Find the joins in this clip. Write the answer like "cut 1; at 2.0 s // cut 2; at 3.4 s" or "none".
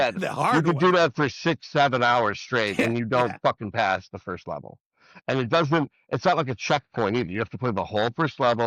none

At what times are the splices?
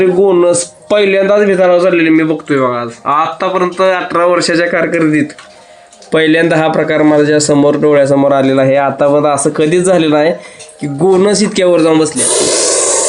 cut 1; at 12.2 s

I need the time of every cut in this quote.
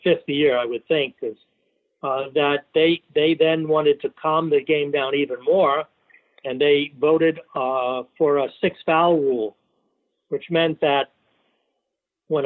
none

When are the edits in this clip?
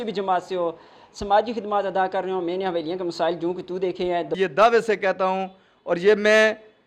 cut 1; at 4.3 s

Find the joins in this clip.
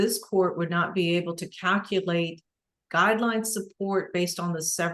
none

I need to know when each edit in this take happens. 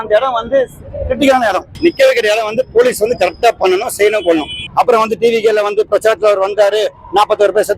cut 1; at 1.6 s // cut 2; at 4.6 s

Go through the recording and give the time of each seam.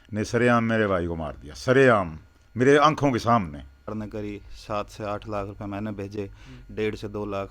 cut 1; at 3.9 s

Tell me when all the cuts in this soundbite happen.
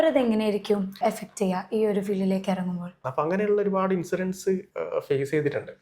cut 1; at 1.0 s // cut 2; at 3.0 s

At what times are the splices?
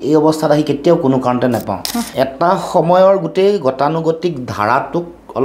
cut 1; at 2.1 s

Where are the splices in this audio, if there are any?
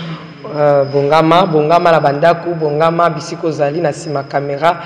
none

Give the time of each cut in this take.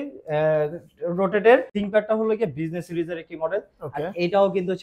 cut 1; at 1.8 s

